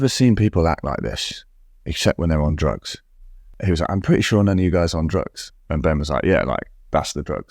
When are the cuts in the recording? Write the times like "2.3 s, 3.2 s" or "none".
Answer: 3.5 s